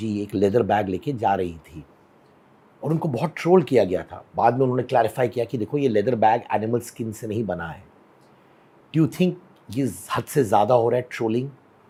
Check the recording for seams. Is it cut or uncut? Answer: uncut